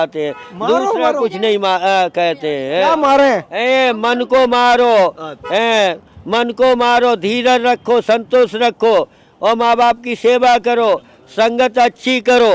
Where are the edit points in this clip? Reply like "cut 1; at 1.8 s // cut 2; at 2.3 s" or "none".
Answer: none